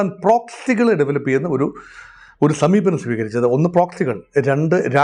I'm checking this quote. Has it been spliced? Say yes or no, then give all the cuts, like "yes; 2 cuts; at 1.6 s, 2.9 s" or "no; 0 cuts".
no; 0 cuts